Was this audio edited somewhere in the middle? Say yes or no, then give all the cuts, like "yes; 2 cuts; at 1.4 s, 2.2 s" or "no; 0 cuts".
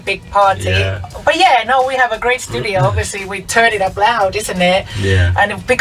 no; 0 cuts